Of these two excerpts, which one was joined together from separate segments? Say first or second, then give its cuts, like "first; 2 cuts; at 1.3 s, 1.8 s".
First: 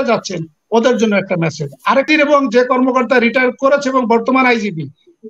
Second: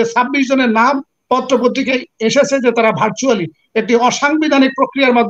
first; 1 cut; at 2.1 s